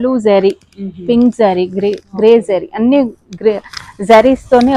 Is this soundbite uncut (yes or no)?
yes